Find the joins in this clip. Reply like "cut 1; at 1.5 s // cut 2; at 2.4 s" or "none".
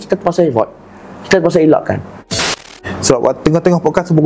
cut 1; at 2.6 s